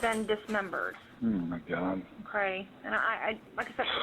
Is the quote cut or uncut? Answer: cut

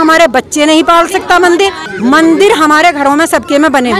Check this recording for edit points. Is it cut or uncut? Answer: cut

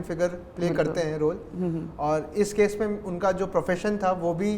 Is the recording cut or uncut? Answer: uncut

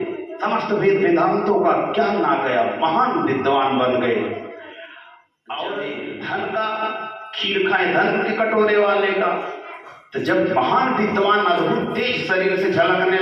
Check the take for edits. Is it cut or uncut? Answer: cut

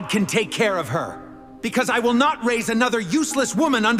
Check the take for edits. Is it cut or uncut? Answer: uncut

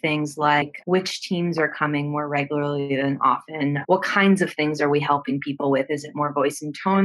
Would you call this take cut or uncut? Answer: cut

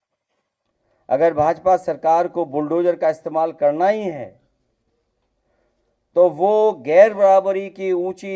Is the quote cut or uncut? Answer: cut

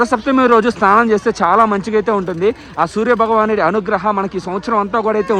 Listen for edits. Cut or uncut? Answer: uncut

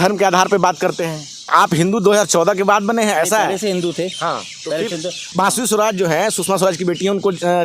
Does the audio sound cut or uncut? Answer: cut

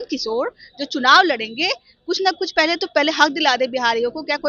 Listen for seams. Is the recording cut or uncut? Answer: uncut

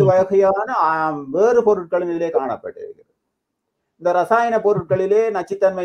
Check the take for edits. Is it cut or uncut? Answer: uncut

